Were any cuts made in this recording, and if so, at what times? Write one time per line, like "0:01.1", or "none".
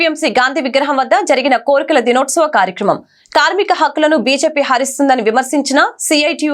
none